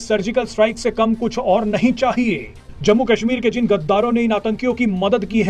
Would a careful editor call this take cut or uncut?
uncut